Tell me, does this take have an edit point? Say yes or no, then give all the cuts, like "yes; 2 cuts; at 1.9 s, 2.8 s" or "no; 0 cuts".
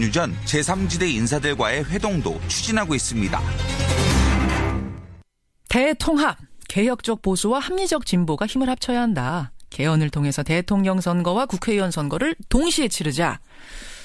no; 0 cuts